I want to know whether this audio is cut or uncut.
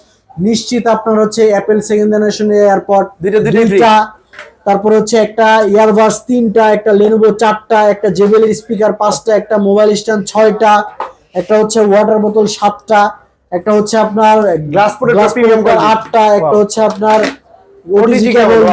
uncut